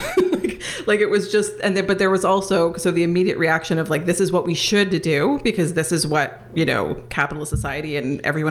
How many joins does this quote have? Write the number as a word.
zero